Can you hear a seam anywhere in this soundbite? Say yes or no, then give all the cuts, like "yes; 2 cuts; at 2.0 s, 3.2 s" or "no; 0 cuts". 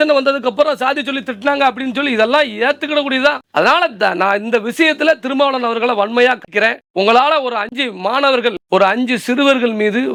no; 0 cuts